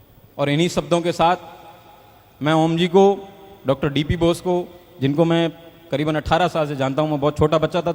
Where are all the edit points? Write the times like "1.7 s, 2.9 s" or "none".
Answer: none